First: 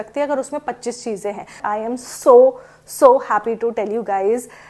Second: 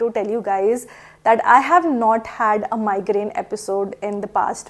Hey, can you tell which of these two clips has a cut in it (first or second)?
first